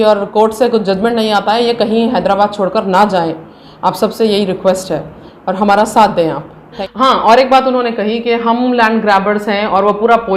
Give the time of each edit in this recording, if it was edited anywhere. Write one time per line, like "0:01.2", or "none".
0:06.8